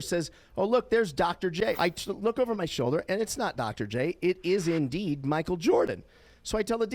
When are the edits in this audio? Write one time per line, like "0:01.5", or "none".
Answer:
0:01.7